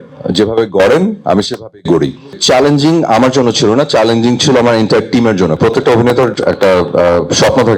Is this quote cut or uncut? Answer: cut